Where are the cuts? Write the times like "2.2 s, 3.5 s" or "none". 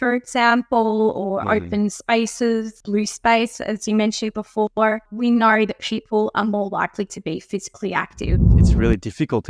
2.8 s, 5.1 s, 8.5 s